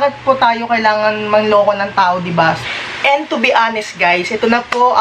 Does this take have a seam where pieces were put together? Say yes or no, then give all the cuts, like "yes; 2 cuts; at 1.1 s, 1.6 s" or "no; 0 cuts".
yes; 1 cut; at 2.6 s